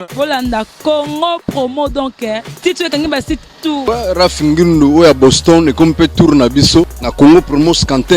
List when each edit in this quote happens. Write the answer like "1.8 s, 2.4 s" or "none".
3.8 s, 7.0 s